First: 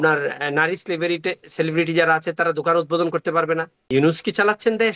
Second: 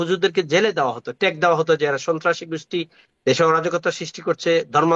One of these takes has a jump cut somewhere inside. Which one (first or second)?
first